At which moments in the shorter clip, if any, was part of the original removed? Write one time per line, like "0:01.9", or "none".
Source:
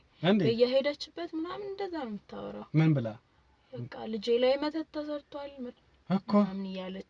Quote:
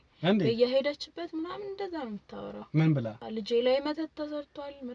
0:03.2